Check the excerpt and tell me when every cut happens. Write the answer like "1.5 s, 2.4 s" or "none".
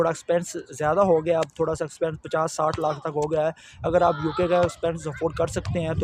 none